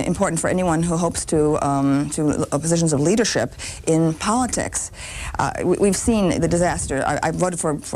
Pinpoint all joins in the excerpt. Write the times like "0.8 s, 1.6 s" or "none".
2.6 s